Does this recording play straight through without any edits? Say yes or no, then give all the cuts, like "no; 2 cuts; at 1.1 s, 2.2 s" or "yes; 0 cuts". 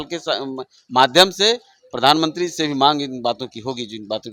yes; 0 cuts